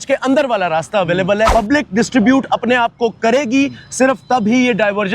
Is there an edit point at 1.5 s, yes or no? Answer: yes